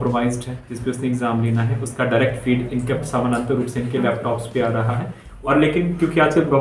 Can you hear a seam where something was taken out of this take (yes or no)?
yes